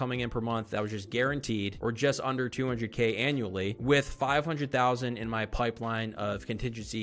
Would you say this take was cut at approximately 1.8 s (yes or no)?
no